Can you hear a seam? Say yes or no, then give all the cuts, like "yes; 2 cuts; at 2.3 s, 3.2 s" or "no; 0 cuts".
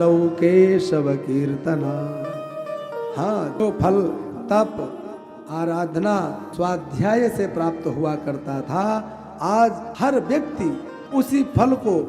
yes; 2 cuts; at 6.4 s, 9.9 s